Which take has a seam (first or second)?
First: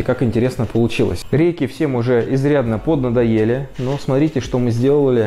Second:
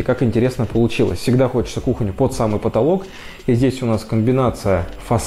first